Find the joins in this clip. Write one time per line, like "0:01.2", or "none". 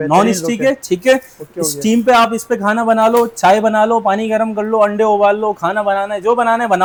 none